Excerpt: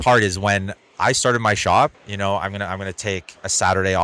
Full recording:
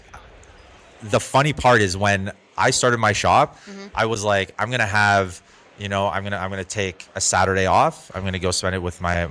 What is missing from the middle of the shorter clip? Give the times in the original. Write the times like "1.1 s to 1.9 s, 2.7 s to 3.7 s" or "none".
3.6 s to 5.8 s